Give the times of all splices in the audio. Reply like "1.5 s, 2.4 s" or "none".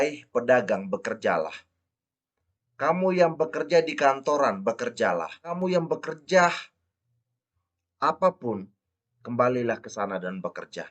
5.4 s